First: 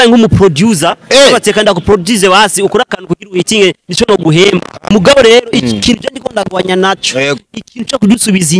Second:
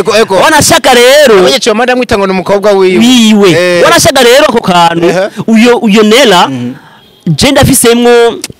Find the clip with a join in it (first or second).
first